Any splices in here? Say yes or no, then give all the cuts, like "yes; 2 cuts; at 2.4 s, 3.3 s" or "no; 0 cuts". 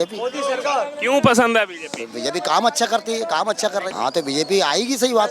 yes; 1 cut; at 3.8 s